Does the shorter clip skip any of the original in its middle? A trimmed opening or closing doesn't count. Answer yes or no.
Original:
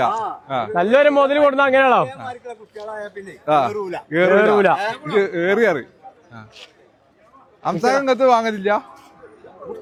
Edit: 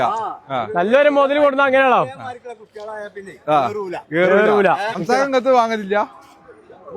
yes